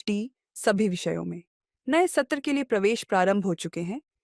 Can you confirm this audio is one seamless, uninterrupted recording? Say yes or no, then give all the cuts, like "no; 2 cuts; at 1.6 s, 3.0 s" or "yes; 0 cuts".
yes; 0 cuts